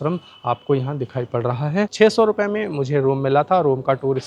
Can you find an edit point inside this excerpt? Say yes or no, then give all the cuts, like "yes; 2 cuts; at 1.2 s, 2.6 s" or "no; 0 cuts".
yes; 1 cut; at 1.9 s